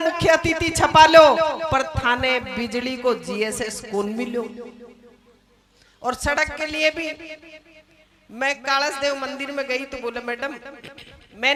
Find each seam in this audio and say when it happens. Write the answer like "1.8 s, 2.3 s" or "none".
none